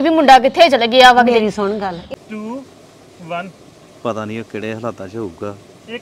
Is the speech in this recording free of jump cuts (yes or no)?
no